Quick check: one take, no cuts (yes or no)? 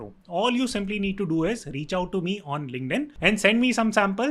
no